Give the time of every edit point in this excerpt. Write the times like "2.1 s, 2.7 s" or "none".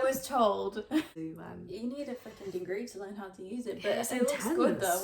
1.2 s

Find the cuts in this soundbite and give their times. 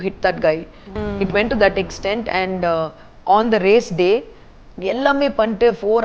0.9 s

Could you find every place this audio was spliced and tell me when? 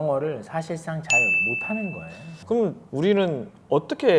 2.8 s

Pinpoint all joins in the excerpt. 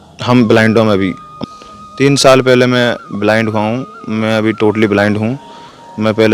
1.3 s

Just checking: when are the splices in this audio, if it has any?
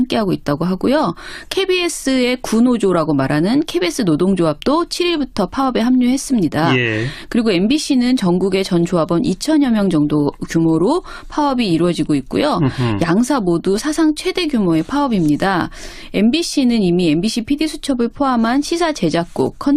none

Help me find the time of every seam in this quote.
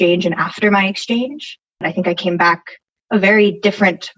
1.8 s

